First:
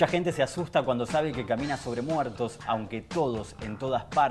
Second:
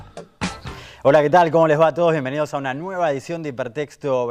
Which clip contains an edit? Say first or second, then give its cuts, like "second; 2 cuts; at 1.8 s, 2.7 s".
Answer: first; 1 cut; at 2.3 s